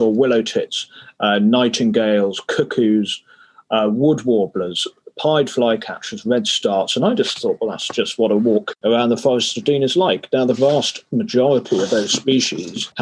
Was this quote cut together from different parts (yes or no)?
no